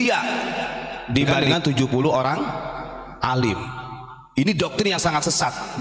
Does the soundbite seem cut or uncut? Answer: cut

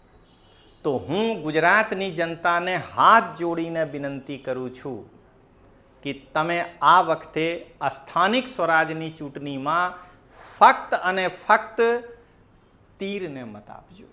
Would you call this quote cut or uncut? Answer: uncut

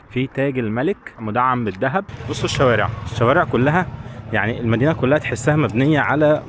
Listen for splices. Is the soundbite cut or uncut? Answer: cut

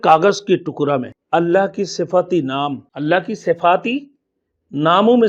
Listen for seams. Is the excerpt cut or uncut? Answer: cut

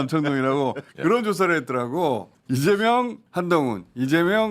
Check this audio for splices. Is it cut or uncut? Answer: cut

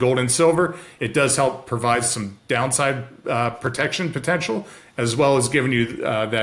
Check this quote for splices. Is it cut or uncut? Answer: uncut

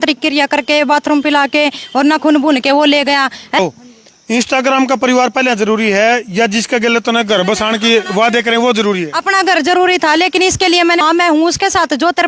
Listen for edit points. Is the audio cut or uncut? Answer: cut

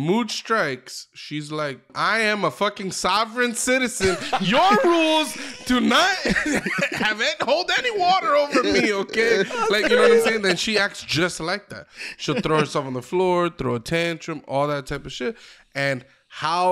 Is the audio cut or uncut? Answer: cut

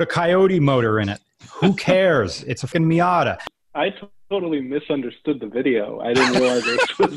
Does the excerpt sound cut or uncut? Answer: cut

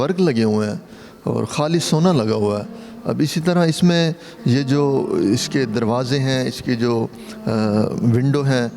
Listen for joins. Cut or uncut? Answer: uncut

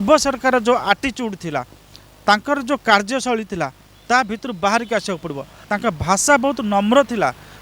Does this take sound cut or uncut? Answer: cut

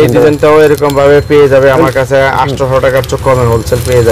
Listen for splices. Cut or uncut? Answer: uncut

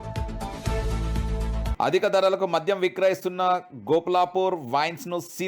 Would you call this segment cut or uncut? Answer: cut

